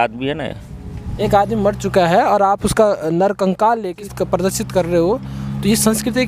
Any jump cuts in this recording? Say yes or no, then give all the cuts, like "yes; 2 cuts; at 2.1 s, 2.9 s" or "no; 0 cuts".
yes; 2 cuts; at 1.1 s, 4.0 s